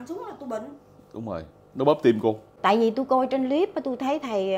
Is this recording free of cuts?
no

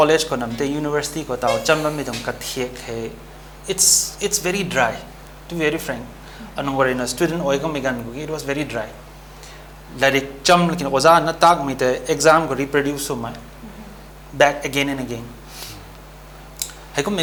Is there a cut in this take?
no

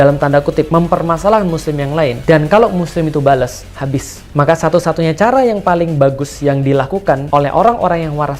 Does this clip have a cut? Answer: yes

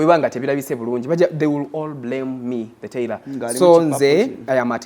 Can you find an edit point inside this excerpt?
no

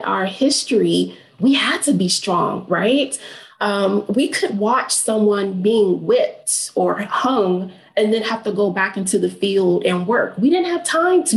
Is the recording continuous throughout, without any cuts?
yes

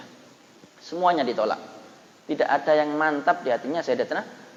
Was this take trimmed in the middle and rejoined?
no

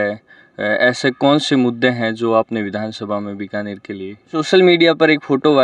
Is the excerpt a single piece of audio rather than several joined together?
no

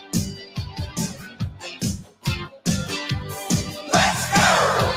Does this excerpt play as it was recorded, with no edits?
yes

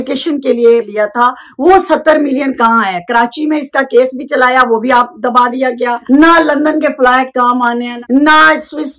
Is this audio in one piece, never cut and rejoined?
no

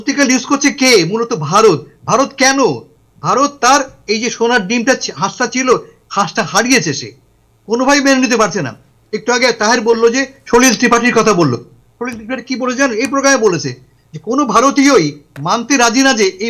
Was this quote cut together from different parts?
no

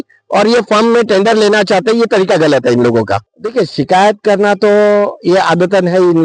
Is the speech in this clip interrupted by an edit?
yes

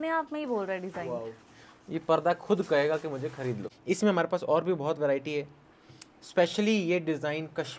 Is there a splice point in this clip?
yes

